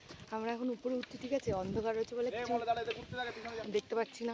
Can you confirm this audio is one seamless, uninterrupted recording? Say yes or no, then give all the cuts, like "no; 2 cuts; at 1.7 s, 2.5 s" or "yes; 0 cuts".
yes; 0 cuts